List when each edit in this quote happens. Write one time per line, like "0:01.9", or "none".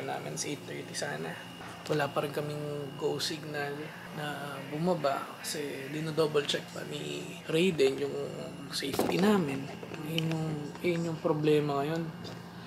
0:01.6